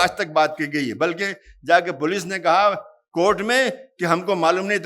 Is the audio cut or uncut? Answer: uncut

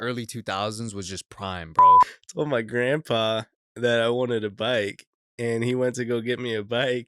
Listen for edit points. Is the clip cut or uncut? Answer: cut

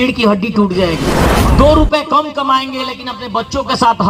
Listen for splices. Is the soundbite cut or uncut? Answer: cut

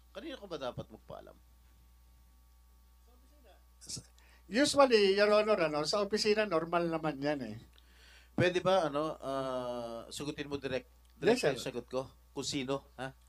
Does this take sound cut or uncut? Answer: uncut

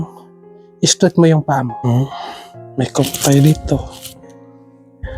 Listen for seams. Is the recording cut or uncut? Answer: cut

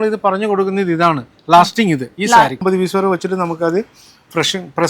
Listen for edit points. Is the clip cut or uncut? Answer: cut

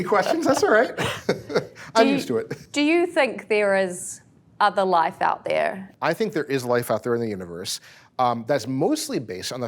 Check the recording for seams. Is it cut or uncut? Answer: cut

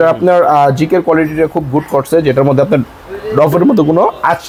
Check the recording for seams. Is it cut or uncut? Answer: uncut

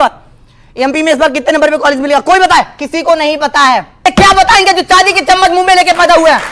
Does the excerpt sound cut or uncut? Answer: cut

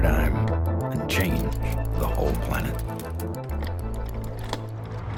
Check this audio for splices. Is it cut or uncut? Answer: uncut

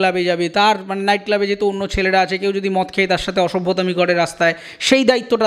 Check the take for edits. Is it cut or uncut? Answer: uncut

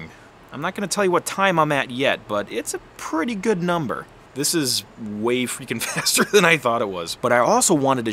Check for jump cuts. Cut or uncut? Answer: cut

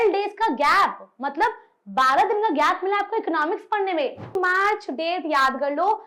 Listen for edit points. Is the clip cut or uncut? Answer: cut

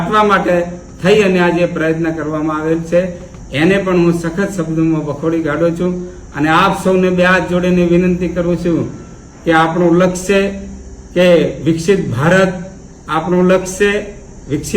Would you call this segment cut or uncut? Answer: uncut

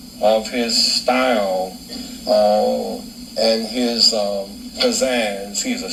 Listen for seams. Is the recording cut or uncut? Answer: uncut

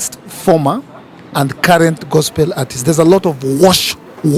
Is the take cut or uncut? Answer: uncut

